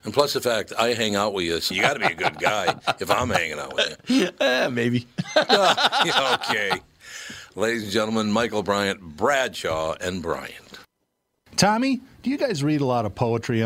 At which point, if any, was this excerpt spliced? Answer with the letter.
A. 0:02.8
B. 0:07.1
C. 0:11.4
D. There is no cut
C